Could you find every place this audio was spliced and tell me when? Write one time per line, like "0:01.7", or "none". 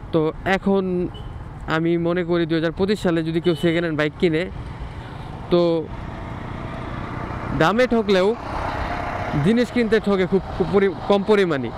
none